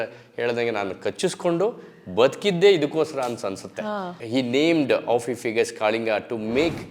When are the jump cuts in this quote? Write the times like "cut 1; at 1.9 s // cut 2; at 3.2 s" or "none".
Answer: cut 1; at 4.2 s